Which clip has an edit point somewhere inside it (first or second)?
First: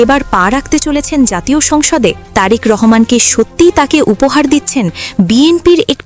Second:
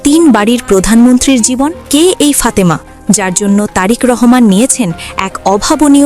second